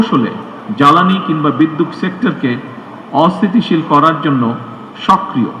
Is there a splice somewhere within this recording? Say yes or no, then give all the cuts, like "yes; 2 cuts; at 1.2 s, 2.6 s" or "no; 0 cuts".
no; 0 cuts